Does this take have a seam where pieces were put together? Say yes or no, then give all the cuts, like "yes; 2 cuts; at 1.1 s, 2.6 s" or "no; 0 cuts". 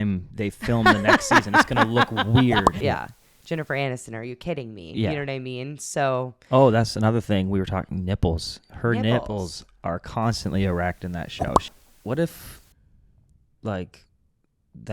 yes; 2 cuts; at 2.7 s, 11.6 s